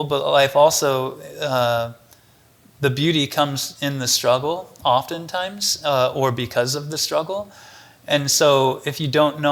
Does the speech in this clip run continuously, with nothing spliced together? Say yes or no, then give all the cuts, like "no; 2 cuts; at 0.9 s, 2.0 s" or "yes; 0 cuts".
yes; 0 cuts